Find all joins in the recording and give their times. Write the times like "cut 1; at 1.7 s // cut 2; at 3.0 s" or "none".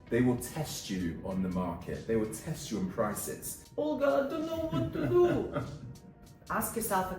cut 1; at 3.6 s